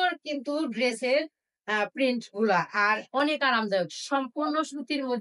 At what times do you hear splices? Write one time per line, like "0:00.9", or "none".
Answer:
none